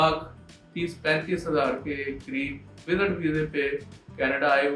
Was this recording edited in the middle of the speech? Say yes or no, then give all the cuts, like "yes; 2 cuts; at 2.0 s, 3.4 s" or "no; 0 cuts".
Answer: no; 0 cuts